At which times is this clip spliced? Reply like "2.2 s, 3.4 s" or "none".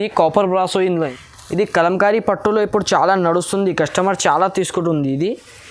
0.9 s